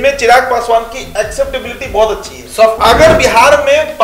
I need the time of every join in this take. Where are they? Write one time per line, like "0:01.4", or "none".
0:02.8